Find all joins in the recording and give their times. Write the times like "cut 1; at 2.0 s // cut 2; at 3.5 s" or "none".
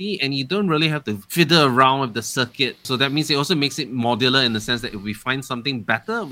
cut 1; at 1.2 s // cut 2; at 2.9 s